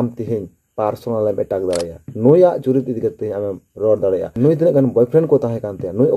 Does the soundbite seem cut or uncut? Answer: cut